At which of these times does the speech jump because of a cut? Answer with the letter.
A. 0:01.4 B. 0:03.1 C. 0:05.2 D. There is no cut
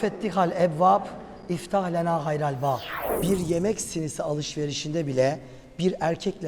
B